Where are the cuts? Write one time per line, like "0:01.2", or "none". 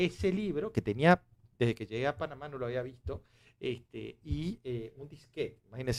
none